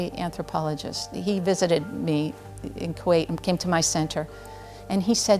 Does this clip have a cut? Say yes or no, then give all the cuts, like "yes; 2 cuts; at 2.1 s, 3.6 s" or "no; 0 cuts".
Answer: no; 0 cuts